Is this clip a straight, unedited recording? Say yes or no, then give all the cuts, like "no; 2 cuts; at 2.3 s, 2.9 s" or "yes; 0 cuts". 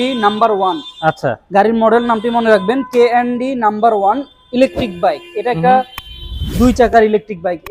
yes; 0 cuts